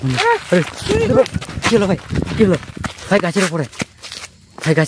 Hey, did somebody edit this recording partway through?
no; 0 cuts

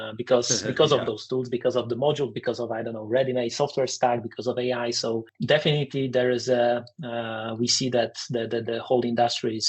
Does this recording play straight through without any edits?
no; 1 cut; at 5.3 s

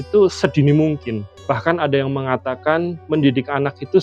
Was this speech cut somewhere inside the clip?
no; 0 cuts

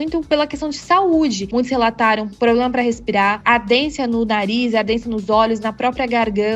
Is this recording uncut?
no; 2 cuts; at 1.5 s, 3.4 s

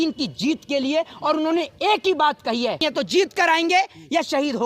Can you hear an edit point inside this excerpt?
yes; 1 cut; at 2.8 s

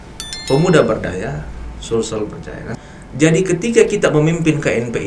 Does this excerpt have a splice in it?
yes; 1 cut; at 2.6 s

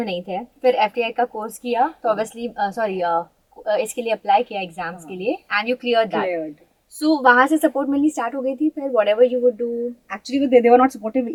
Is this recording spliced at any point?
no; 0 cuts

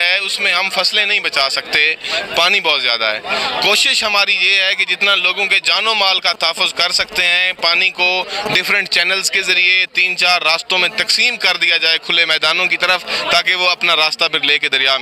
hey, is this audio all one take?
yes; 0 cuts

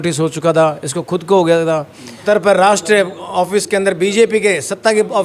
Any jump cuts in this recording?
yes; 1 cut; at 2.2 s

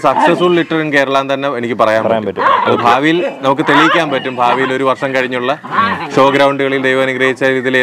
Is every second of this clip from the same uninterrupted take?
yes; 0 cuts

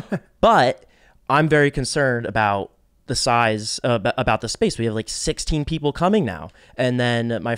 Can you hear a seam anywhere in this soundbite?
no; 0 cuts

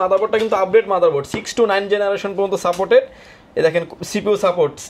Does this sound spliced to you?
no; 0 cuts

